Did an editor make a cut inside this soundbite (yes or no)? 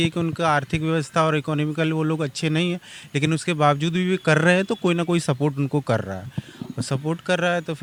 no